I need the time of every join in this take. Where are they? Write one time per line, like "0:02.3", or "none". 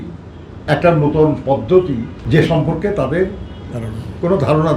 0:02.1